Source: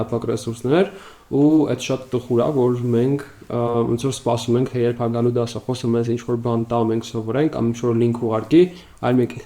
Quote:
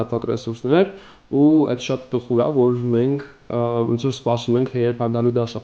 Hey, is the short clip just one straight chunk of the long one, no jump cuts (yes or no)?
yes